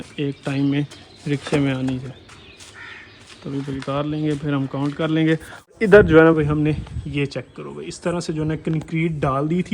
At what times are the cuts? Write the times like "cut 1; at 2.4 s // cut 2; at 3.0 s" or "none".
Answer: cut 1; at 5.7 s